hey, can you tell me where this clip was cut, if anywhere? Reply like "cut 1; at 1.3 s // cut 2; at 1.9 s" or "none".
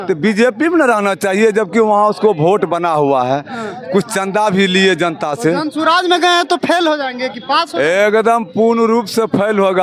none